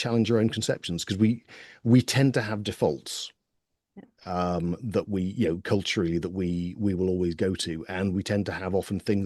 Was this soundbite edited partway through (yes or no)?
no